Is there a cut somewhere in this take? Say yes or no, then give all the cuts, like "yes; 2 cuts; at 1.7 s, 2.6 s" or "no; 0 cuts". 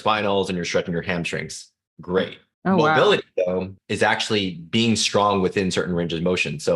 yes; 2 cuts; at 2.4 s, 3.8 s